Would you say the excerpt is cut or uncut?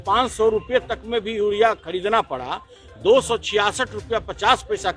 uncut